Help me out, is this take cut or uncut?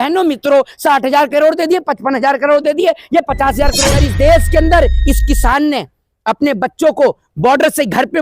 cut